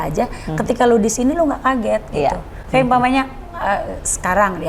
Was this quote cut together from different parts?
no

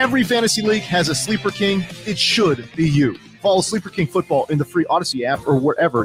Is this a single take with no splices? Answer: yes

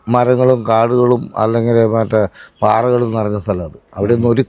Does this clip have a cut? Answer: no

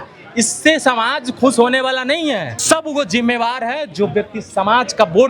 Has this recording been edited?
yes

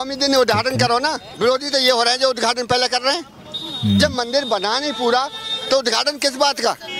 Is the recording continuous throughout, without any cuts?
no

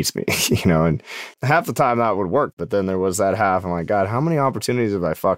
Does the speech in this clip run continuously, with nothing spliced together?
no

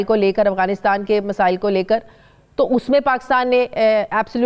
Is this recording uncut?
yes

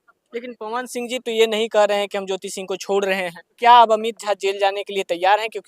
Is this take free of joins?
no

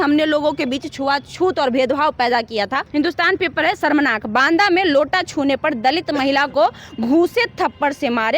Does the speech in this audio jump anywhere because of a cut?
yes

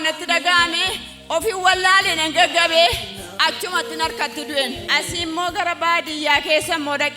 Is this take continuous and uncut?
no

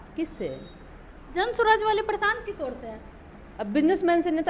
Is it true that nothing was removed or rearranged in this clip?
yes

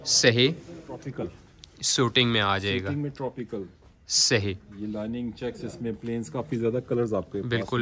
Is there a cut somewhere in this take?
yes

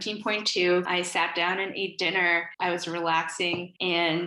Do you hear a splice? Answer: no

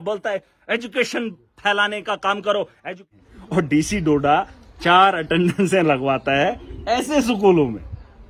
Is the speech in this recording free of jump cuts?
no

